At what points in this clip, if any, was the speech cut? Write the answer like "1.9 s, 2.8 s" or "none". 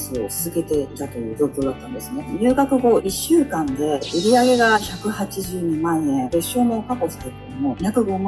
2.2 s, 4.0 s